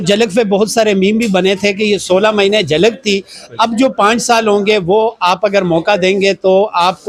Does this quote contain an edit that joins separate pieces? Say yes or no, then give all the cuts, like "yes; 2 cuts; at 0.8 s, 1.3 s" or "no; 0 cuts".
no; 0 cuts